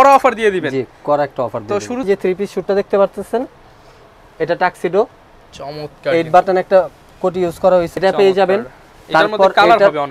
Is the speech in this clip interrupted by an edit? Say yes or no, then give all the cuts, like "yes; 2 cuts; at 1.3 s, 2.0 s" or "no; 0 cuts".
yes; 2 cuts; at 2.1 s, 7.9 s